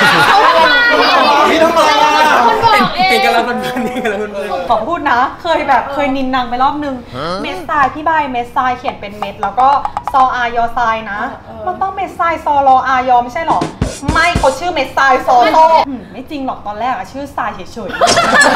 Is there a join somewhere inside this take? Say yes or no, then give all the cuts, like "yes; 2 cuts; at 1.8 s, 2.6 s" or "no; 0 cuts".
yes; 2 cuts; at 4.6 s, 15.9 s